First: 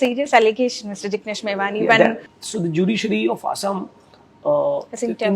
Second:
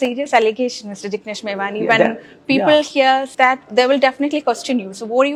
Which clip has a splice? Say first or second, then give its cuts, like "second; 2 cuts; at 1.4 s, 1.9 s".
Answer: first; 1 cut; at 2.3 s